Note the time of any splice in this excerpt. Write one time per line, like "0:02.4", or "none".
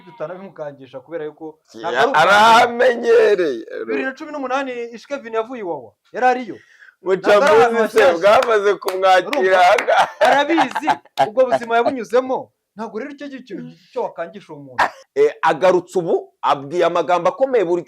0:15.0